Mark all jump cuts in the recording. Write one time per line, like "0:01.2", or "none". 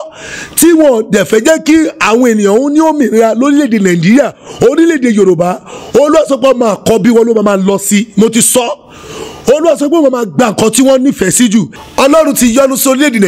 0:11.8